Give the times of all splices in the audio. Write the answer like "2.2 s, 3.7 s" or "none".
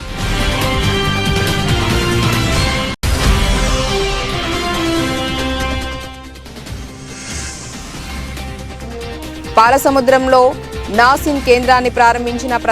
3.0 s, 7.9 s